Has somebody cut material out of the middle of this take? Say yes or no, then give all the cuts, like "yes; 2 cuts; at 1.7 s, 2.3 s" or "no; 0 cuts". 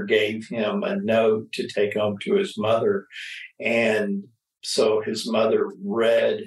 no; 0 cuts